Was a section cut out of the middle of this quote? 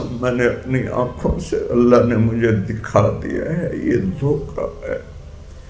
no; 0 cuts

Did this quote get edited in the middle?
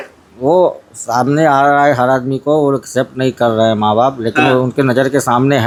no; 0 cuts

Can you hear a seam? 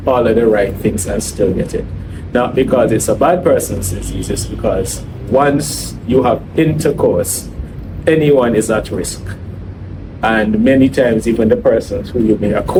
no; 0 cuts

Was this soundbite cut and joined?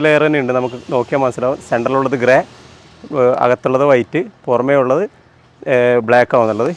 no; 0 cuts

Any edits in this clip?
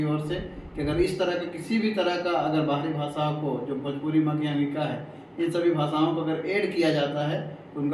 no; 0 cuts

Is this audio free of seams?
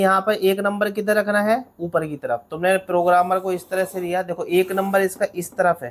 yes; 0 cuts

